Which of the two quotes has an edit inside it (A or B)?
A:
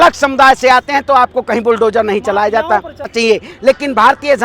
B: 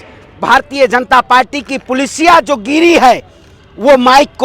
A